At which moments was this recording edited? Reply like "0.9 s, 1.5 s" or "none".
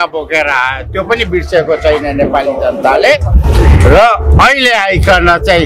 none